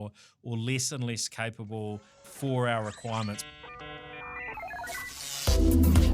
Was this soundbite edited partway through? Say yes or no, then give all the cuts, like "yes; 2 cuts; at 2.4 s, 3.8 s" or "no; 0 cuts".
yes; 3 cuts; at 2.3 s, 3.5 s, 5.3 s